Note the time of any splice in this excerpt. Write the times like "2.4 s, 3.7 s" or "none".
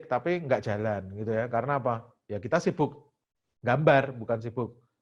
none